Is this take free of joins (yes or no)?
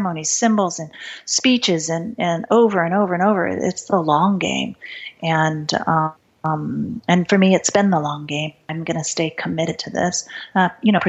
no